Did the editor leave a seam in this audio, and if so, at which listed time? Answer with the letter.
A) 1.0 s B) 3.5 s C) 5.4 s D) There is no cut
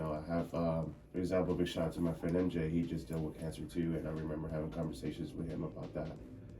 A